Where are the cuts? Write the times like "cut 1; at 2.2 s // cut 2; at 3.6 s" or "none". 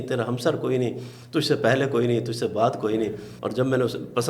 cut 1; at 3.3 s

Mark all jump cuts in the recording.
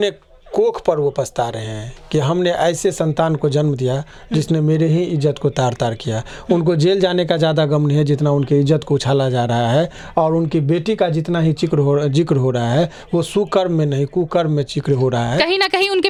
none

